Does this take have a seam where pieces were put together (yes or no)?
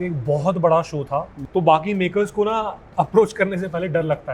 yes